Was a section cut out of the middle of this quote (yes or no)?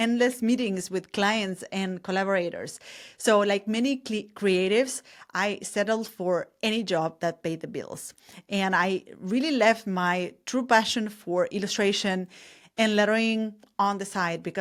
no